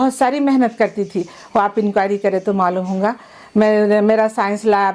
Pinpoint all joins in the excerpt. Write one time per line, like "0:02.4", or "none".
none